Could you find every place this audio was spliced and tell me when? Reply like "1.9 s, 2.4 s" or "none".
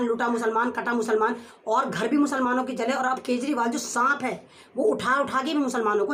none